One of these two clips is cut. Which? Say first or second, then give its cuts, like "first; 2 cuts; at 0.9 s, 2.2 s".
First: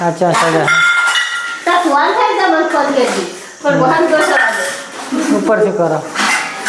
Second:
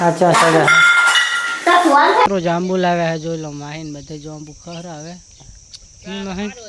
second; 1 cut; at 2.3 s